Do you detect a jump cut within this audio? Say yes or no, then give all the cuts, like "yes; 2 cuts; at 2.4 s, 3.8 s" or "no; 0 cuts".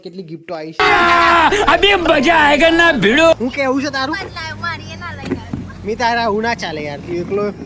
yes; 2 cuts; at 0.8 s, 3.4 s